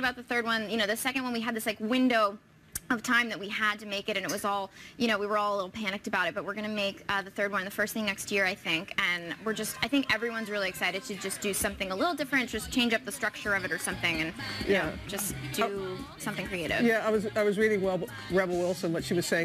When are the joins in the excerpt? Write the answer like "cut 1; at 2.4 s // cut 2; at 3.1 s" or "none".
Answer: none

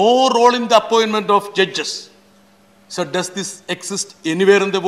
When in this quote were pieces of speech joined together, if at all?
none

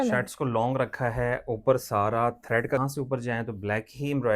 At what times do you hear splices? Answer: cut 1; at 2.8 s

